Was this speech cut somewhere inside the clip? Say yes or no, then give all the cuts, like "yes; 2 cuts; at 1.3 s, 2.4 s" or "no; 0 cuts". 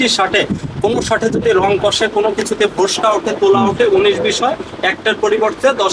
no; 0 cuts